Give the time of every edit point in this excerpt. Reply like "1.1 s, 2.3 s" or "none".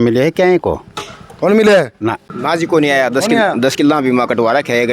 2.3 s